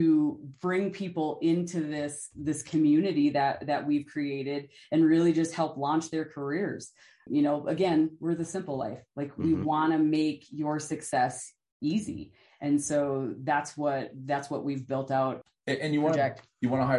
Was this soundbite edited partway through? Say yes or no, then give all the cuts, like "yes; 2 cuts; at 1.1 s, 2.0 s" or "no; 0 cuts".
yes; 1 cut; at 15.4 s